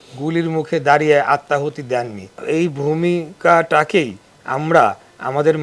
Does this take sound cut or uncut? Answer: cut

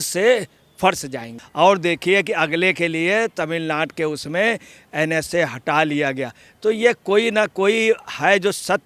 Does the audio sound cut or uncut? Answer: cut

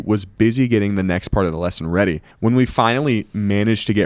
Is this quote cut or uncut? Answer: cut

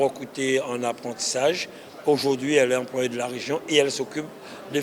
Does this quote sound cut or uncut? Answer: uncut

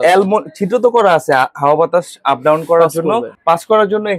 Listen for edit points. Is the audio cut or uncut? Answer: cut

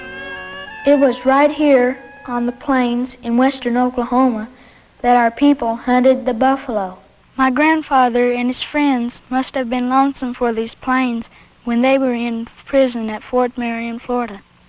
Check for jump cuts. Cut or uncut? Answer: uncut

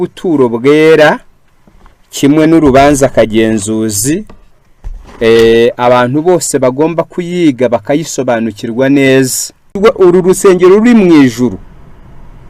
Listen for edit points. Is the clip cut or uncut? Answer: cut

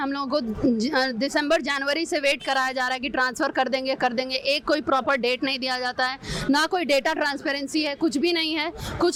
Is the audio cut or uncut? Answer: uncut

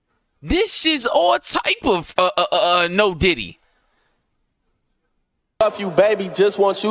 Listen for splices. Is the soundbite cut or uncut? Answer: cut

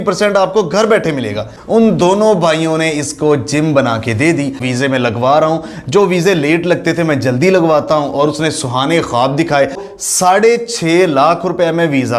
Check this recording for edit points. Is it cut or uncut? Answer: cut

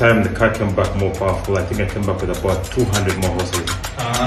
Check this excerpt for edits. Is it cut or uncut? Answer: uncut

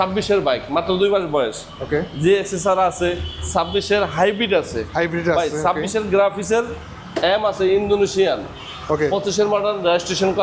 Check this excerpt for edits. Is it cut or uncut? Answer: uncut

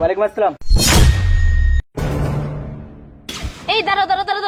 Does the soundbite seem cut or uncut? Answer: uncut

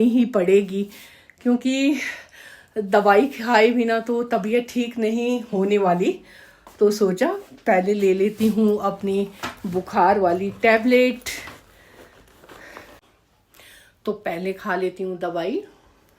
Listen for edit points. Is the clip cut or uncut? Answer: cut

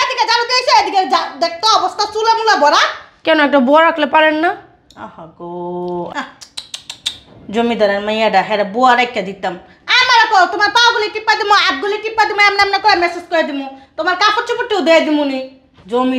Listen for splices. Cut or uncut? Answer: cut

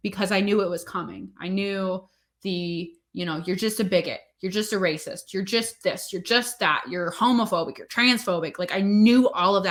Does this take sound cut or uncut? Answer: uncut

